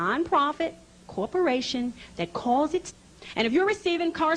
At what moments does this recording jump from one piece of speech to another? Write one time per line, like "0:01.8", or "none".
none